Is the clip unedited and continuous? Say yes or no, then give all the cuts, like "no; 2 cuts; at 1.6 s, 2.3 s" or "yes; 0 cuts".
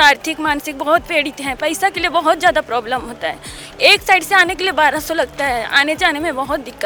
yes; 0 cuts